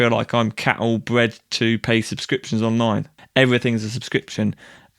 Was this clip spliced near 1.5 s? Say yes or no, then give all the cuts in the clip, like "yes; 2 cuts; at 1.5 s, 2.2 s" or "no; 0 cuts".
no; 1 cut; at 3.1 s